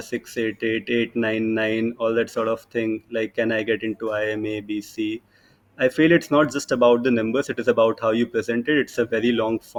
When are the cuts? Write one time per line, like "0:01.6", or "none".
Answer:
none